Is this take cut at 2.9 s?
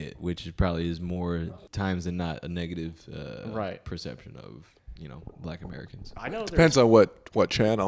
no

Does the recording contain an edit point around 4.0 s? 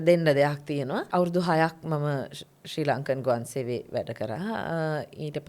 no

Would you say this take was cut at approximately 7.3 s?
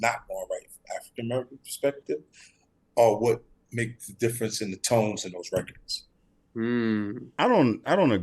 yes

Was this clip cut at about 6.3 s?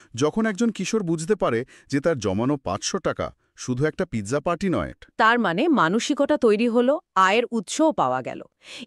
no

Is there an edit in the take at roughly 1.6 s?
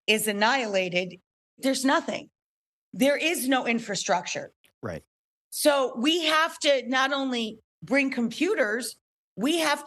yes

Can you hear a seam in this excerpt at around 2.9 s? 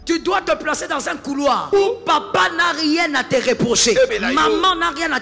no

